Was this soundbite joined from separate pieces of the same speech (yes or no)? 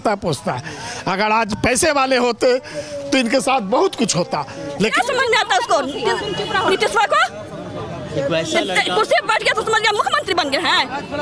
yes